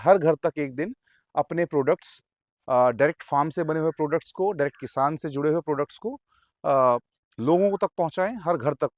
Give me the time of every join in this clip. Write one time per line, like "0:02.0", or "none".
none